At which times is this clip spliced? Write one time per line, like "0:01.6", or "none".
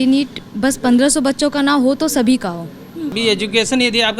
0:03.2